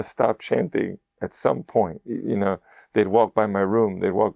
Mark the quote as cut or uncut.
uncut